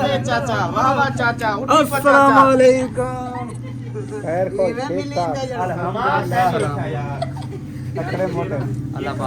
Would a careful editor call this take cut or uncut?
uncut